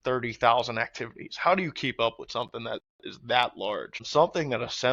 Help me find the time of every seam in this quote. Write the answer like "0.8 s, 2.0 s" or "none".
3.9 s

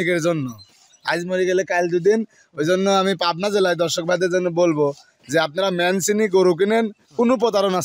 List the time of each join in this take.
none

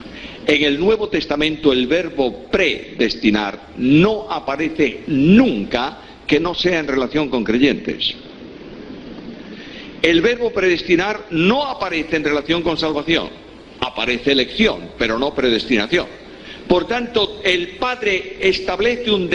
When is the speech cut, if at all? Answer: 7.9 s

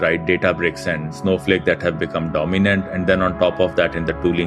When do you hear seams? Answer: 1.1 s

